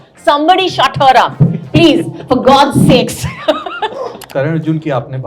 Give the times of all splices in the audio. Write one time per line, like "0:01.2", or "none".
0:04.2